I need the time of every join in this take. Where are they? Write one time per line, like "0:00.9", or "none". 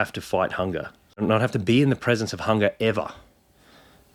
none